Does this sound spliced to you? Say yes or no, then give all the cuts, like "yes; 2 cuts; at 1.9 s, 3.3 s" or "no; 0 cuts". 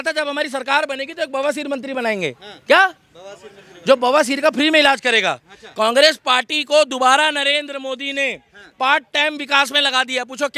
no; 0 cuts